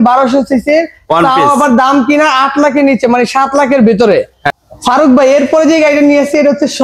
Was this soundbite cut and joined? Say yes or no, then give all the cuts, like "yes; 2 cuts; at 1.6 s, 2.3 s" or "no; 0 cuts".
yes; 1 cut; at 4.4 s